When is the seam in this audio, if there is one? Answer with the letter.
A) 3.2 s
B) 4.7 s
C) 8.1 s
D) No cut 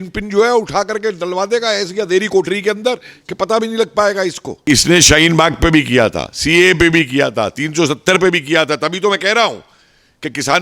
B